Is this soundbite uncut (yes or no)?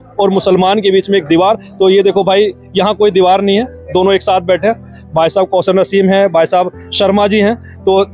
yes